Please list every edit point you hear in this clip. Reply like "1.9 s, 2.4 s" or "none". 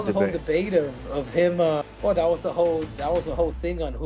1.9 s